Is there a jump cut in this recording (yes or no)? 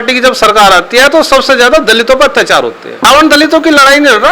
yes